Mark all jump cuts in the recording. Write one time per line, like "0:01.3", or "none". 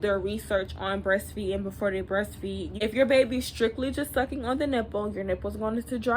0:02.7